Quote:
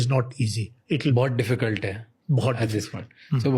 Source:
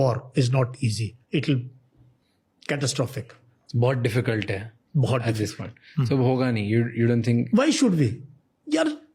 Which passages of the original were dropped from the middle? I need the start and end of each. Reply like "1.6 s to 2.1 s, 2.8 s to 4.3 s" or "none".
1.6 s to 3.8 s

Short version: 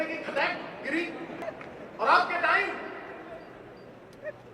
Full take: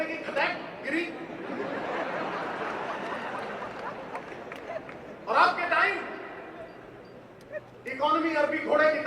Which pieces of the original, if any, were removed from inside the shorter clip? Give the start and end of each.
1.4 s to 4.7 s

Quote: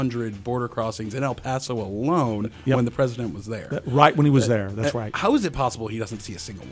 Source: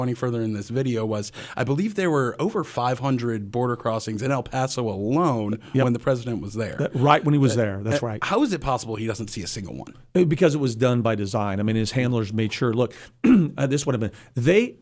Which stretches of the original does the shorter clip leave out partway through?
none

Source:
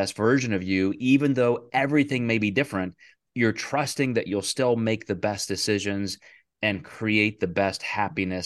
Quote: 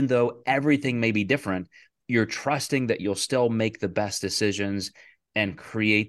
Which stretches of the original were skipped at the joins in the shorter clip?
none

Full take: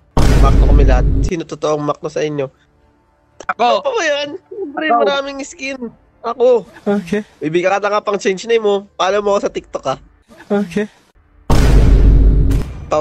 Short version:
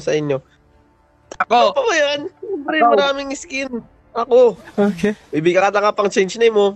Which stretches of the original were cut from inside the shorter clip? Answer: none

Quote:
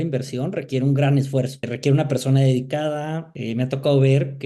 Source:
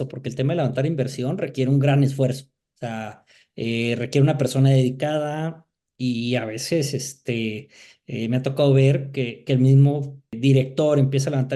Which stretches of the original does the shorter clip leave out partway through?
2.6 s to 4.0 s, 5.6 s to 8.0 s

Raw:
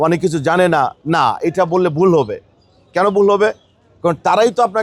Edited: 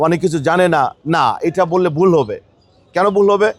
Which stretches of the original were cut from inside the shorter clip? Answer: none

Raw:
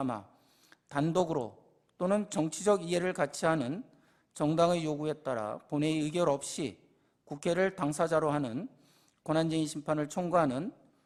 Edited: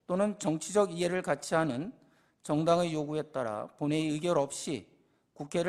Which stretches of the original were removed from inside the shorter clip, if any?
none

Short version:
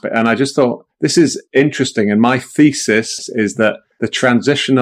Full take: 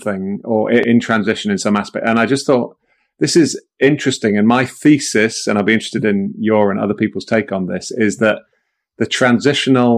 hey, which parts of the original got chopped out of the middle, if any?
3.2 s to 3.5 s, 5.4 s to 7.7 s, 8.5 s to 8.8 s

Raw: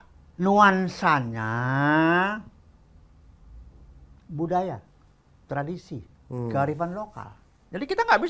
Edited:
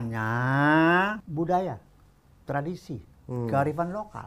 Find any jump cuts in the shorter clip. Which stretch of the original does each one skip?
2.5 s to 4.3 s

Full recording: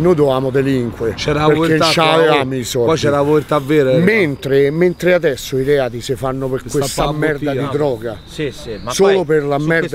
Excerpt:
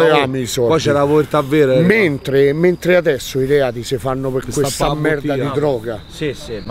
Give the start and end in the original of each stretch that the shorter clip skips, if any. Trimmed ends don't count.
none

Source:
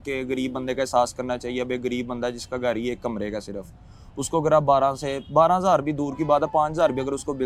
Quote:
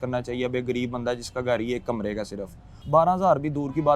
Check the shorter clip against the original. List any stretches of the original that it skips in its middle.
3.9 s to 5.1 s

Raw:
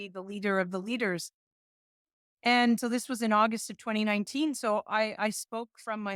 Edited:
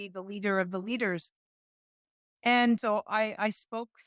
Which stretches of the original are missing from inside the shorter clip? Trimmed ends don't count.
2.8 s to 4.6 s

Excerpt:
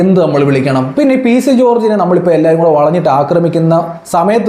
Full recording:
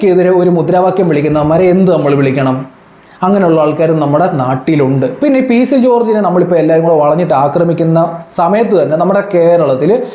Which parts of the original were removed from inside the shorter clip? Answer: 2.6 s to 5.2 s

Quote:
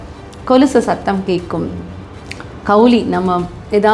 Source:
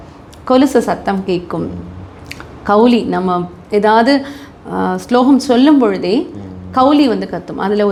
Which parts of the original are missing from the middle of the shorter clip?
none

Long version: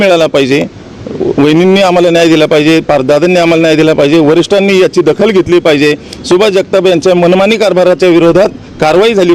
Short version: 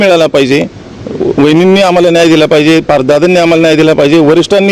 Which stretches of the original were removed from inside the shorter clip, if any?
none

